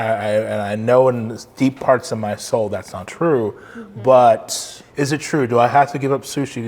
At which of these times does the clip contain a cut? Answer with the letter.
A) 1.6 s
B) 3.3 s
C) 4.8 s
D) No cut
C